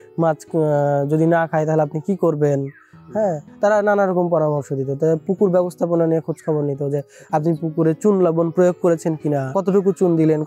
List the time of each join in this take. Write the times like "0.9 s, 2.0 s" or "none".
9.5 s